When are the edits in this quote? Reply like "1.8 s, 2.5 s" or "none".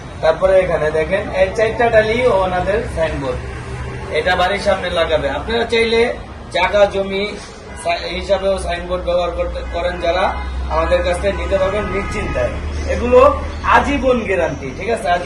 none

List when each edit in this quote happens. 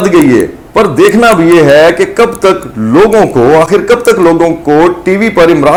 none

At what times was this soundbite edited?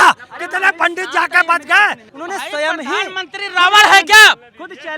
2.1 s

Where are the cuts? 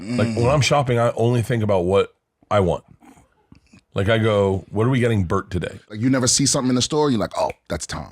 5.9 s

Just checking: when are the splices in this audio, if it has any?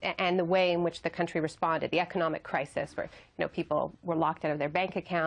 none

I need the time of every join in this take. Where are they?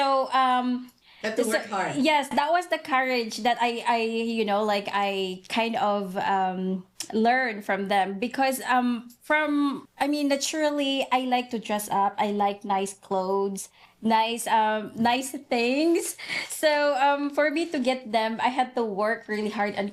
none

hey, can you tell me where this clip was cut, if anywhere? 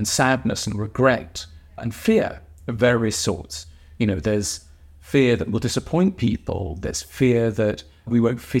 none

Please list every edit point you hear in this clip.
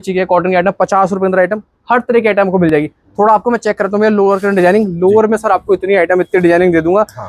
none

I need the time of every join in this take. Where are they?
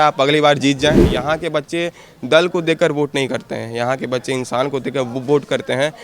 1.1 s

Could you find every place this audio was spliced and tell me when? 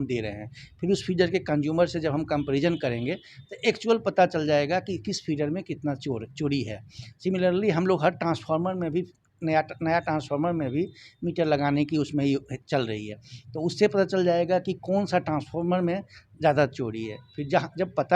none

